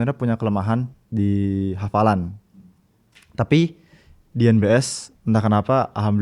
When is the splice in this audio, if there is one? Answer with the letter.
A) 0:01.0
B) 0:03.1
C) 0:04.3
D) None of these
A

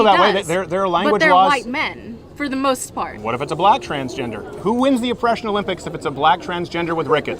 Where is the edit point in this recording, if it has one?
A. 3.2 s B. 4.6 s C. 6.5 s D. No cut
B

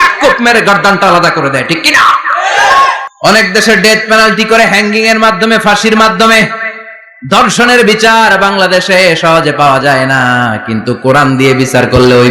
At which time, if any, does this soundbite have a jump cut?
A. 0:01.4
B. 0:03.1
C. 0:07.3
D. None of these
B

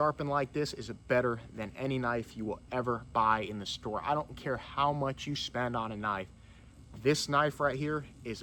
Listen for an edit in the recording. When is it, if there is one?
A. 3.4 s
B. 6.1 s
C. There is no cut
C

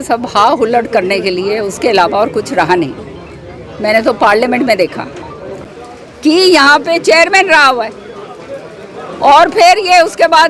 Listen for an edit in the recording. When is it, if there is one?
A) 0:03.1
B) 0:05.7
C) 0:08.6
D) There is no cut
B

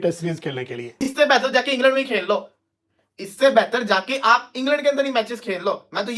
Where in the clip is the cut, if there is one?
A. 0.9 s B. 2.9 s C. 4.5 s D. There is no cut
A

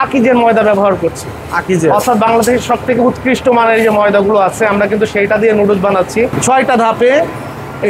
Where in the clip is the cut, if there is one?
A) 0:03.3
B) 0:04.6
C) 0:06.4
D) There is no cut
C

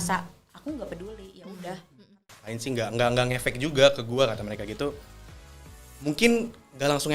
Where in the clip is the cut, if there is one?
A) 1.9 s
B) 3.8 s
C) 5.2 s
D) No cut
A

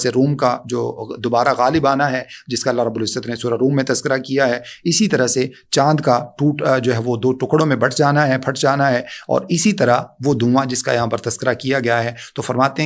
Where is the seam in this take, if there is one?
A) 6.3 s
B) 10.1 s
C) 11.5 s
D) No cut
D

